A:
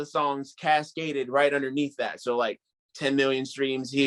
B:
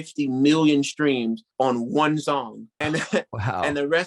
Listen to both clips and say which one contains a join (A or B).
B